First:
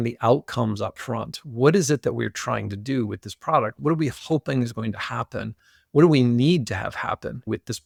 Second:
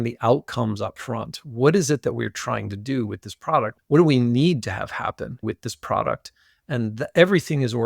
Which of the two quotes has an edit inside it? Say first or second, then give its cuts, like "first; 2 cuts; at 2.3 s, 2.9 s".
second; 1 cut; at 3.7 s